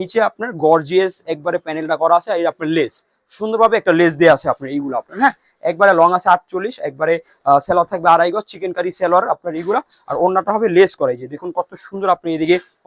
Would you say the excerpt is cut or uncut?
uncut